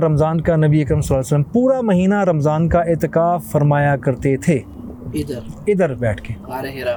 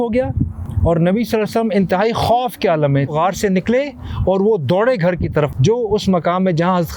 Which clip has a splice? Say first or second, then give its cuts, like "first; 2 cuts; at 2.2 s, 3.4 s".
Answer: second; 2 cuts; at 3.1 s, 5.5 s